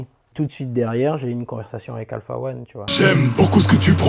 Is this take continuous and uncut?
no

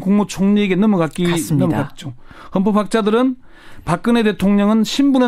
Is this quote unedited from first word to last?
no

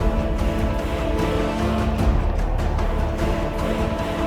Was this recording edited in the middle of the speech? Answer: no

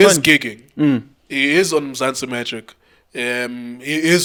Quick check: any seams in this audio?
no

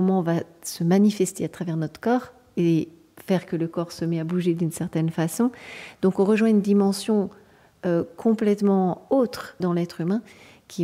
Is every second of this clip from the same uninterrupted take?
no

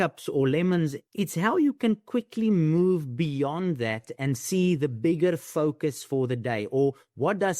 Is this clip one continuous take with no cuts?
no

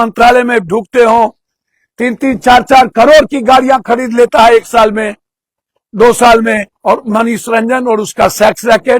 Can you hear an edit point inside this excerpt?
yes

